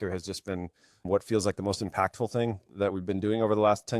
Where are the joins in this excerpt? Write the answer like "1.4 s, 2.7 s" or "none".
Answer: 1.0 s

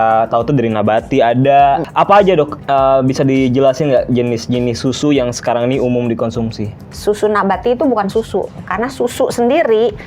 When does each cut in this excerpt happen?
1.9 s, 6.9 s

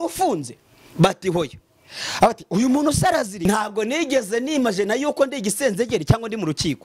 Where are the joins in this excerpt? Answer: 3.5 s

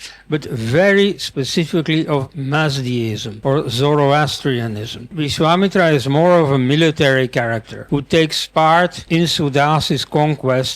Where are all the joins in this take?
3.3 s, 5.2 s, 7.7 s, 9.0 s

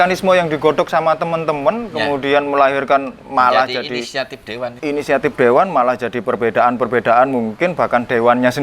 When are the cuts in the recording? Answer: 4.8 s

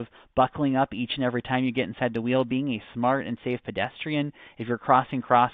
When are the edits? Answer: none

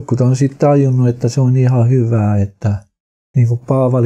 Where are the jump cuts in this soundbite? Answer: 2.9 s

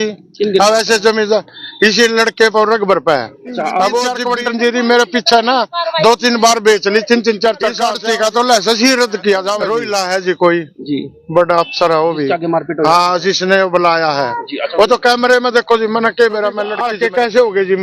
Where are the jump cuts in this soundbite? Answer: 4.2 s, 7.9 s, 9.7 s, 16.8 s

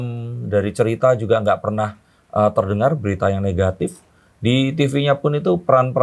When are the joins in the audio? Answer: none

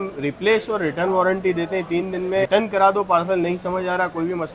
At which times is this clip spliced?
2.5 s

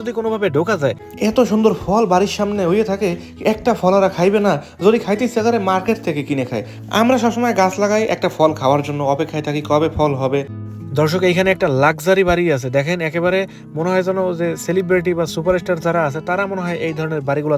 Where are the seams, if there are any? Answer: 1.1 s, 10.6 s

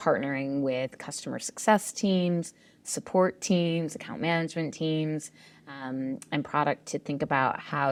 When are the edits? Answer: none

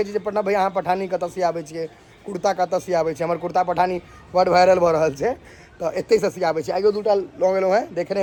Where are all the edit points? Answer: none

